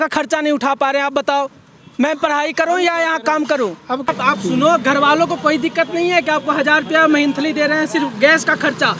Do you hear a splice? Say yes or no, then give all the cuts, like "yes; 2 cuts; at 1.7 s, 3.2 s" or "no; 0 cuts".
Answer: yes; 1 cut; at 4.1 s